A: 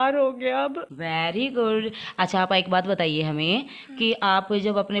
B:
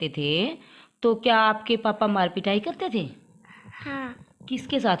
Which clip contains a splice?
A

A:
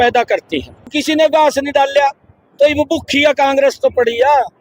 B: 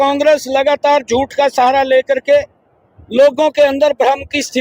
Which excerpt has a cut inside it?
A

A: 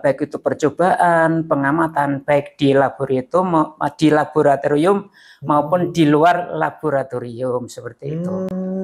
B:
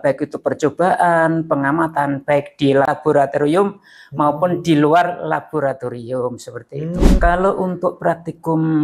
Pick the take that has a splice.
B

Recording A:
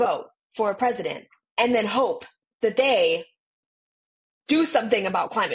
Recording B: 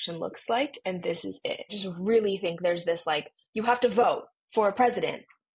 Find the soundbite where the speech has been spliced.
B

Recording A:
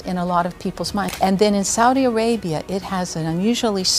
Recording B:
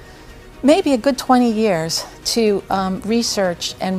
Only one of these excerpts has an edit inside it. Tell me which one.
A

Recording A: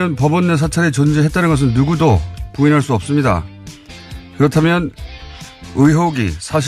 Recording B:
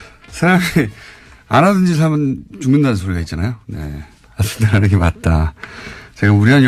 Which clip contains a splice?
A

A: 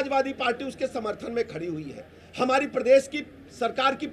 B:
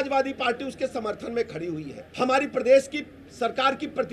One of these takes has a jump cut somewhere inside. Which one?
B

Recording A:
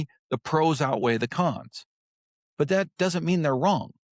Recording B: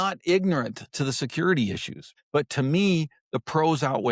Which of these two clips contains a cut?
B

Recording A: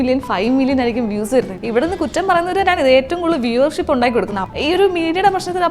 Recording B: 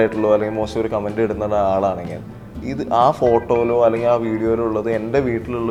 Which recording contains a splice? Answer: A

